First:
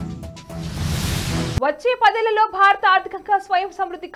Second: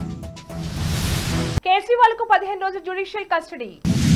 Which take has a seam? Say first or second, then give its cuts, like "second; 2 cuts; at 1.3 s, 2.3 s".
first; 1 cut; at 1.6 s